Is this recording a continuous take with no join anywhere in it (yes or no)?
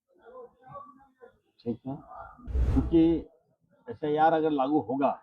no